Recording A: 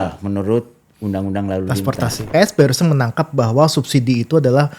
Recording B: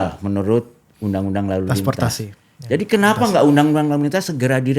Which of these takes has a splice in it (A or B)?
A